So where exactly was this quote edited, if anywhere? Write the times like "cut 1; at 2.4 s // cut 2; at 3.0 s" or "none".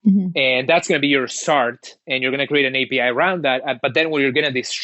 none